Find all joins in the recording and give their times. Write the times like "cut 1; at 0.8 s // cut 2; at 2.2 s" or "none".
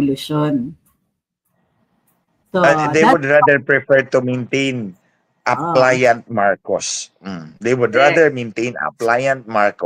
none